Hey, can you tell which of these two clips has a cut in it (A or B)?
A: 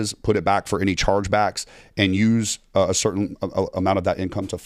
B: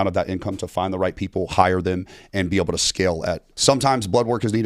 B